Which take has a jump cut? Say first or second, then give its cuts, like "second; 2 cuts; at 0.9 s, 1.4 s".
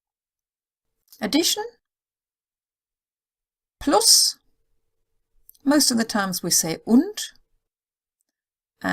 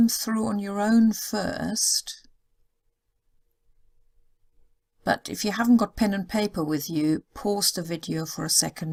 first; 1 cut; at 4.0 s